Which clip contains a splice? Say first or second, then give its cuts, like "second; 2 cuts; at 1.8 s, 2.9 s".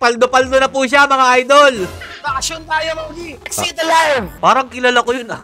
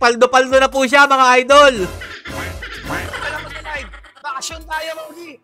first; 2 cuts; at 2.1 s, 4.3 s